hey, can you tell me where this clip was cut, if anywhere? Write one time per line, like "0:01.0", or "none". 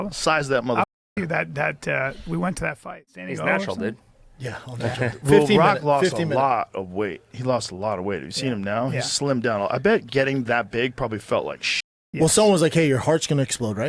0:02.8